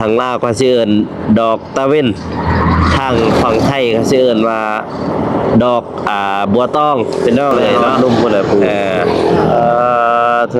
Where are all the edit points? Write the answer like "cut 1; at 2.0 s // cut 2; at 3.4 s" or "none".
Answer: cut 1; at 7.9 s